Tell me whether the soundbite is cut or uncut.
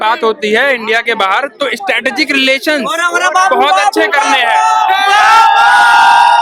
uncut